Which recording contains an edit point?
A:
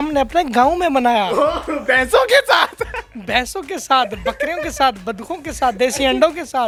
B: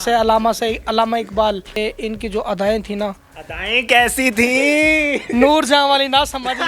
B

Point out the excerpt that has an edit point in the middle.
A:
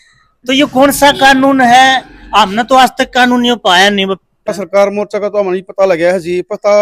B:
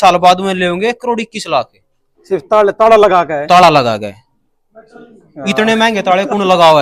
A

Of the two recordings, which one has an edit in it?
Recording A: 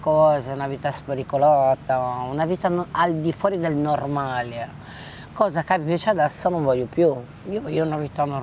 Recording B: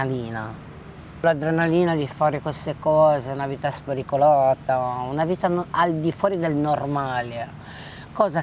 B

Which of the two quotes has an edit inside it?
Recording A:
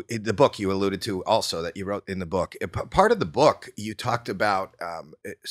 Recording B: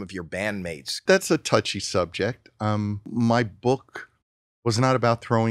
B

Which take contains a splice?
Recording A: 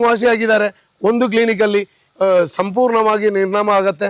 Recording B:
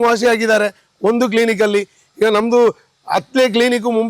A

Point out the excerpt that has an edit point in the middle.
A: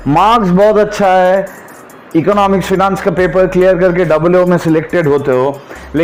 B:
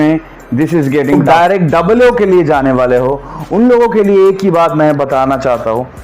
B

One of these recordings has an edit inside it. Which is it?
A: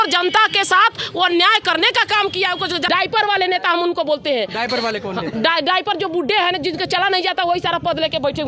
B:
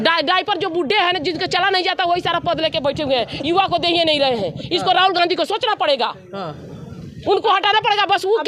A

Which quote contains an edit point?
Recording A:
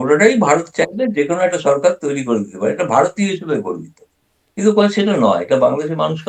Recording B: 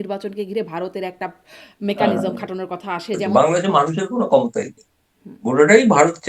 B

